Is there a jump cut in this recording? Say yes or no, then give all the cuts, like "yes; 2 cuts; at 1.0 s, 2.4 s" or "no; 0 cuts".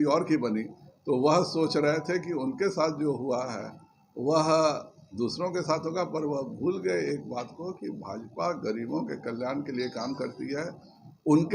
no; 0 cuts